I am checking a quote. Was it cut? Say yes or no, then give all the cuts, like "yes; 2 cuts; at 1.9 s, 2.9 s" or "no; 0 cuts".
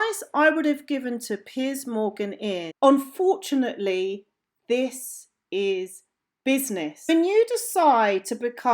yes; 1 cut; at 2.7 s